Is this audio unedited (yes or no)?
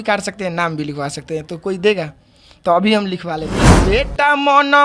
no